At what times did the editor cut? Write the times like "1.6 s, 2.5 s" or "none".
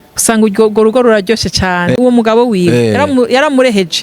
2.0 s